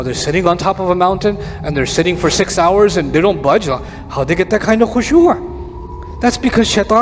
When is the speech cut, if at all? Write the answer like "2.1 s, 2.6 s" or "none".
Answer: none